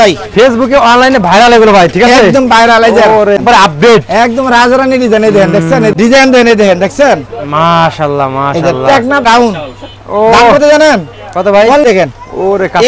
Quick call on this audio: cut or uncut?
cut